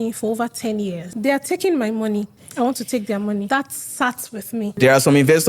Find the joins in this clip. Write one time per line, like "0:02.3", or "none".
0:01.0
0:02.4
0:03.5
0:04.7